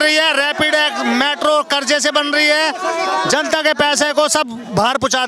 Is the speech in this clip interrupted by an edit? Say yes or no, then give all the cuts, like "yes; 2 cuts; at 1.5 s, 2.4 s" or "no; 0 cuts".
no; 0 cuts